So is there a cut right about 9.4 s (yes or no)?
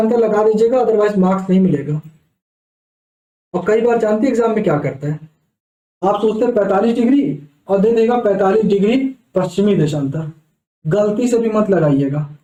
no